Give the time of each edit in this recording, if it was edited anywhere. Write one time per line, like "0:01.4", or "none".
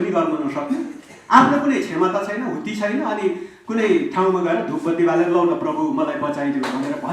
none